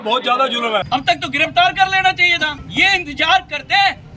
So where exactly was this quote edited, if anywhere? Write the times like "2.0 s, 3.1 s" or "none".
0.9 s, 2.6 s